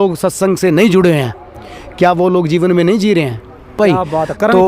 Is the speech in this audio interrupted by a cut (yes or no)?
yes